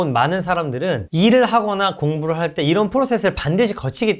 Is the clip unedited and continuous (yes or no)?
yes